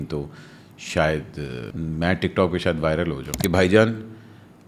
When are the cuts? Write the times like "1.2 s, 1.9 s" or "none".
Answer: 1.7 s, 3.3 s